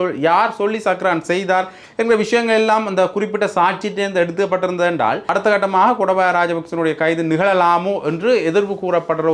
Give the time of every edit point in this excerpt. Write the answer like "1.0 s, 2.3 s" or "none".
5.3 s